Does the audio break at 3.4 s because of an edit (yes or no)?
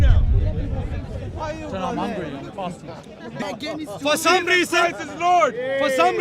yes